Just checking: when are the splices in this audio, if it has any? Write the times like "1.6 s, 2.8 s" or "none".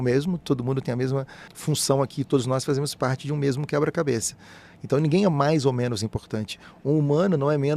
1.5 s